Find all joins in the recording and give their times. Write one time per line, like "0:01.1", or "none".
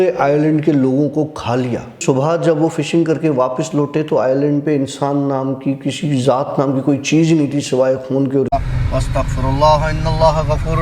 0:01.9
0:08.5